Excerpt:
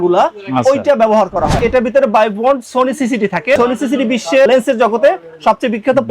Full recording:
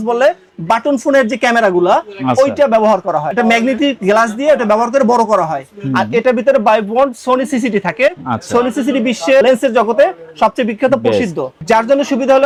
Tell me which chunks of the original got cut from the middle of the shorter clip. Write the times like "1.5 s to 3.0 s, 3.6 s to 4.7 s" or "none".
3.3 s to 6.1 s, 8.1 s to 8.5 s